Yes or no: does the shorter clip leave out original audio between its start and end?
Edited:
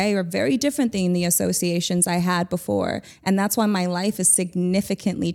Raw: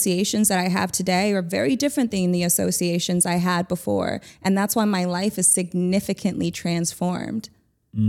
no